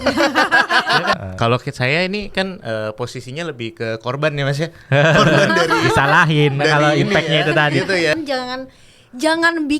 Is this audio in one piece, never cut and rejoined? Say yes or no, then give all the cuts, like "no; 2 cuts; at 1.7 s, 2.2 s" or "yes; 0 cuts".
no; 2 cuts; at 1.1 s, 8.1 s